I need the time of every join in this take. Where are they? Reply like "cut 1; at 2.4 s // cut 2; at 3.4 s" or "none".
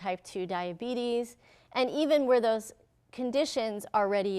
none